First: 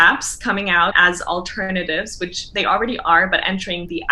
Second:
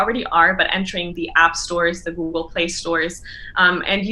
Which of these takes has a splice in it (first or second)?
first